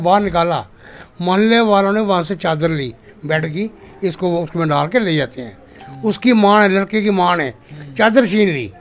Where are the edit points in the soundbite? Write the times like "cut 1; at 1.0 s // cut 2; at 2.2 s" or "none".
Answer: none